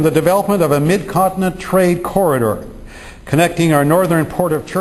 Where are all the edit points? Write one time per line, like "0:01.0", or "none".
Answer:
0:02.8